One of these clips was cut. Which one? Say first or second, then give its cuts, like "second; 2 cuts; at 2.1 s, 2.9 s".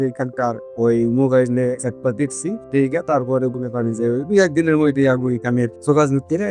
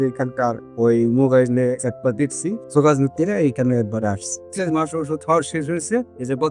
second; 2 cuts; at 2.6 s, 4.5 s